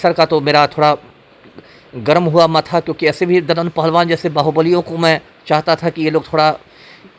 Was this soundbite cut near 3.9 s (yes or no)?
no